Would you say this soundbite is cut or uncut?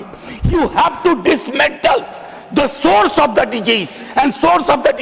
uncut